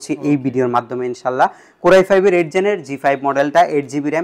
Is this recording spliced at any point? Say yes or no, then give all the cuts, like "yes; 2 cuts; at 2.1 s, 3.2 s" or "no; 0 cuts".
no; 0 cuts